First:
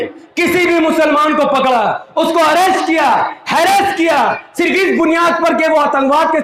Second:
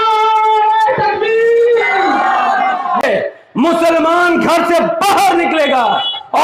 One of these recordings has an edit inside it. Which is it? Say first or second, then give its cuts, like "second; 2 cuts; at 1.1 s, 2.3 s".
second; 1 cut; at 3.0 s